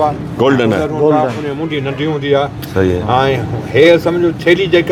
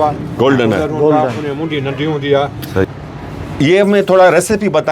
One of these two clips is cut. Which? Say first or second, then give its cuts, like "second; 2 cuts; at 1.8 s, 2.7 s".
second; 1 cut; at 2.8 s